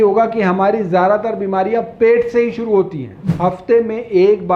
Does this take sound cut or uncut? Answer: cut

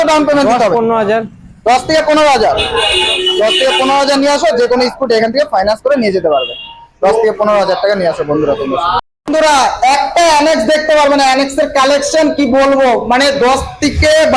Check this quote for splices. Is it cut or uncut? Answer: uncut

